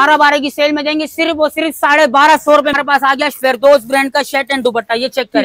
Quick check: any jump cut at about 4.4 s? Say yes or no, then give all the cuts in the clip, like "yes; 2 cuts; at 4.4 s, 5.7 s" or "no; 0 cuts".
no; 1 cut; at 2.8 s